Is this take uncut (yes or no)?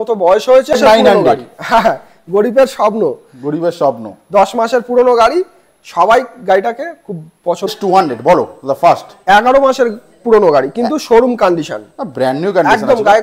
no